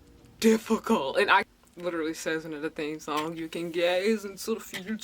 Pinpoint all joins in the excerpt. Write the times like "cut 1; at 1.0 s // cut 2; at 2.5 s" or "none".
cut 1; at 1.5 s